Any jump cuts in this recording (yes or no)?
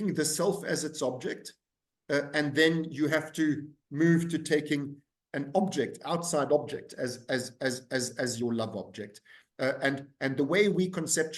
no